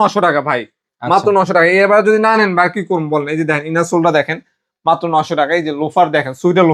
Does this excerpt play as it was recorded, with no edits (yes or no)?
yes